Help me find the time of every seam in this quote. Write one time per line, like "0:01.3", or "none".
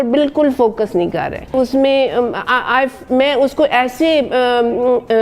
0:01.5